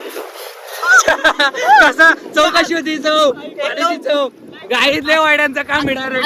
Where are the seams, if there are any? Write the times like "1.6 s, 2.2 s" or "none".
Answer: none

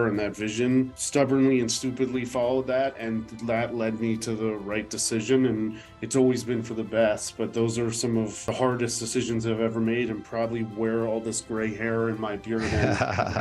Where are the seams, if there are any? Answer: 1.0 s, 8.4 s

